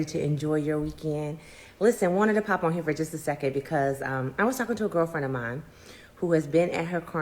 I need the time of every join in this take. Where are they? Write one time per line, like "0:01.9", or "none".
0:01.9

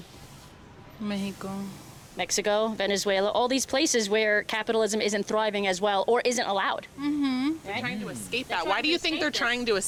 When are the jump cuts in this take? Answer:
none

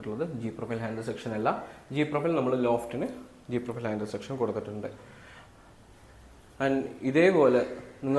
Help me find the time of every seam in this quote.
none

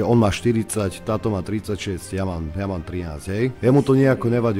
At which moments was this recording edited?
0:03.6

